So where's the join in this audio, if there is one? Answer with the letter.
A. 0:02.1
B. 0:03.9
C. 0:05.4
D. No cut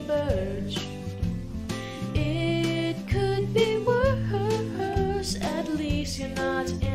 D